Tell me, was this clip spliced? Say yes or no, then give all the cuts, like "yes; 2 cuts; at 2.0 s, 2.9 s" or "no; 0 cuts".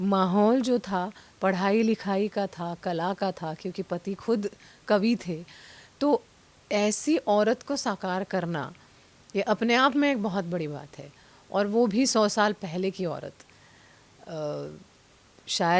no; 0 cuts